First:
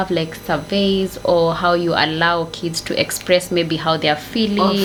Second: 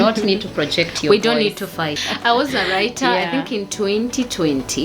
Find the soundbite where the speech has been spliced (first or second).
second